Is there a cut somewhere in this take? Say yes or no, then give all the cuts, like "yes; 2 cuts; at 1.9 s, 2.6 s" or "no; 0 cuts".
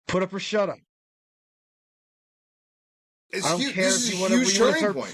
no; 0 cuts